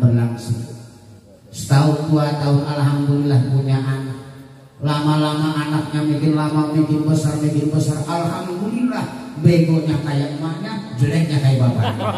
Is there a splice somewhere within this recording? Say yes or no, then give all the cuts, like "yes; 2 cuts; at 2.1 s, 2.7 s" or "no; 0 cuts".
no; 0 cuts